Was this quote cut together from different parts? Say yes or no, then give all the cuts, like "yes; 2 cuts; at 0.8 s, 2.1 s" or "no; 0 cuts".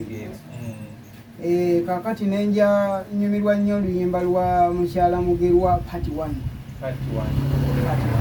no; 0 cuts